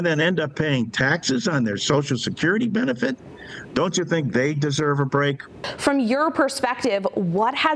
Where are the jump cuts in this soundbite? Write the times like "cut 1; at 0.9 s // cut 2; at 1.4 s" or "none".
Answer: cut 1; at 5.7 s

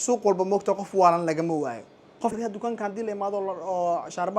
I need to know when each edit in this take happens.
cut 1; at 2.4 s

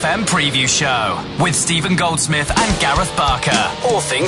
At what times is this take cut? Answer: none

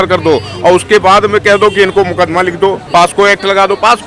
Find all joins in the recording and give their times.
cut 1; at 2.8 s

